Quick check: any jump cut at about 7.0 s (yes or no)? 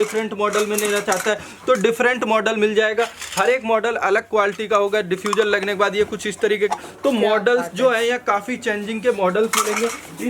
no